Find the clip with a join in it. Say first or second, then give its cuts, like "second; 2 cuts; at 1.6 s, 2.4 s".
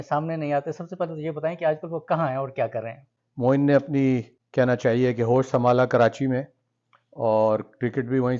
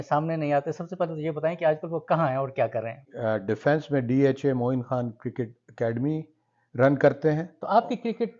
second; 2 cuts; at 3.1 s, 7.5 s